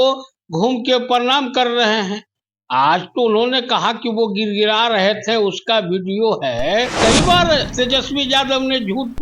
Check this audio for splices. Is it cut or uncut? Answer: cut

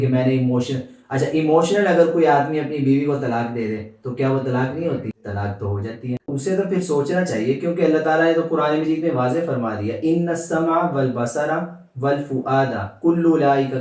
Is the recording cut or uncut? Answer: cut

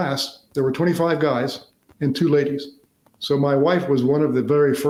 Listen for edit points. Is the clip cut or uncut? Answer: uncut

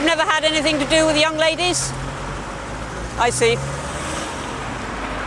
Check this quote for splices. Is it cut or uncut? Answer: uncut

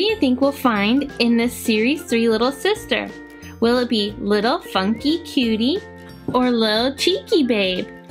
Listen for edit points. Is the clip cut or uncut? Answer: uncut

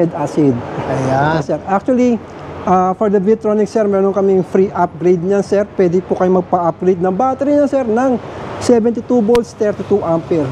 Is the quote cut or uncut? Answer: cut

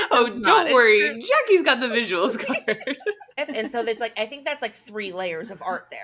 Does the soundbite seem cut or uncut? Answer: cut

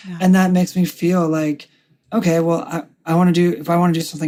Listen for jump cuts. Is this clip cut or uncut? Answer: uncut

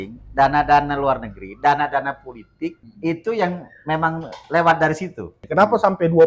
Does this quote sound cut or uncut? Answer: cut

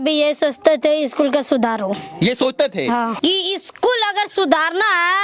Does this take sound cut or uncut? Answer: cut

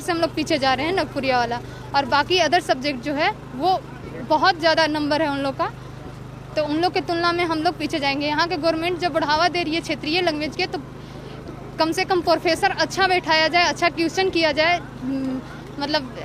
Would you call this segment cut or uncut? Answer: uncut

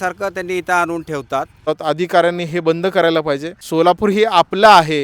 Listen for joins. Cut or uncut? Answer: cut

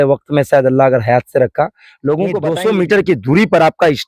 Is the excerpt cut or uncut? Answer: cut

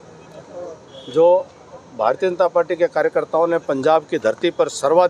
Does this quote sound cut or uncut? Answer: uncut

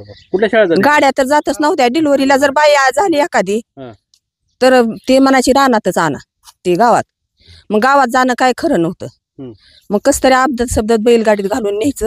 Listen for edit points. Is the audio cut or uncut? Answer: uncut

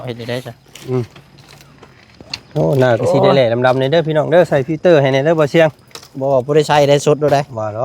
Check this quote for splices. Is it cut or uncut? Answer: uncut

